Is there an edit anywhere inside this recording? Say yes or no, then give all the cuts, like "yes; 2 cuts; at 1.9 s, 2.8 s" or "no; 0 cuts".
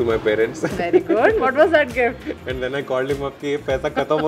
no; 0 cuts